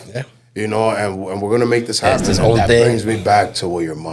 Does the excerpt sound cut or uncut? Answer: cut